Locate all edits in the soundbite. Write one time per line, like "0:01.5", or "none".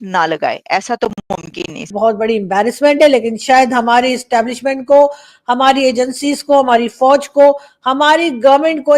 0:01.9